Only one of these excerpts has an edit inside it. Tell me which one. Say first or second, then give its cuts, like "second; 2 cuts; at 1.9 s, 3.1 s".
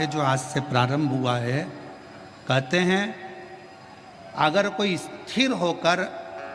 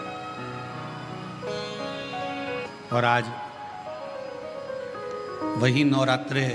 second; 1 cut; at 2.7 s